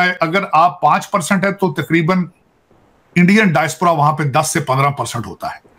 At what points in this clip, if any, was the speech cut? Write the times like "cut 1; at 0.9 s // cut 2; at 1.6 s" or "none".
none